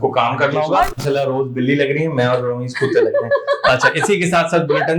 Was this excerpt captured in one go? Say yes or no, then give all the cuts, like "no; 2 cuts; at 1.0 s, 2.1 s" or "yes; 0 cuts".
no; 1 cut; at 0.9 s